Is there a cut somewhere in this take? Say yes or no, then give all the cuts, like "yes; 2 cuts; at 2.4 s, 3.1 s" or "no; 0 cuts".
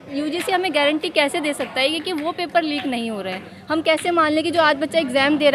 no; 0 cuts